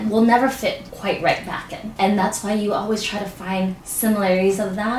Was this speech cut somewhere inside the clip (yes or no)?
yes